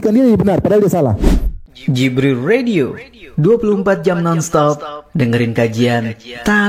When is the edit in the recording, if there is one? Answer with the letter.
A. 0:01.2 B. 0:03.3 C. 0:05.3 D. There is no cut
A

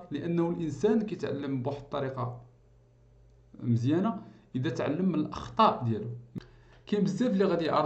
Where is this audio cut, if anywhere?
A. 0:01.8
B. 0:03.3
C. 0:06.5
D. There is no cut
C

